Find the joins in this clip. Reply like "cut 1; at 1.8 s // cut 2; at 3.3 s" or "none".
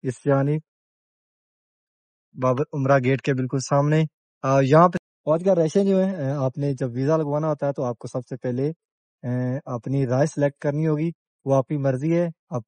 cut 1; at 5.0 s